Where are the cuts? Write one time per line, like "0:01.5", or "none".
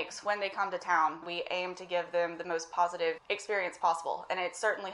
0:01.2
0:03.3